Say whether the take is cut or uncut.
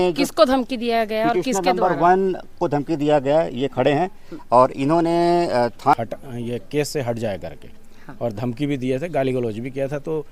cut